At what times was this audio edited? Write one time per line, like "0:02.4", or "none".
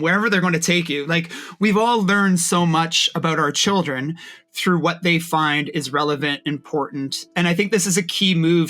0:07.2